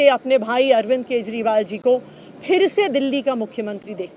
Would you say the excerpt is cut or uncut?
uncut